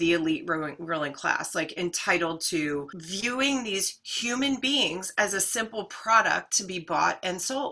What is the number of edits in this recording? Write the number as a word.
one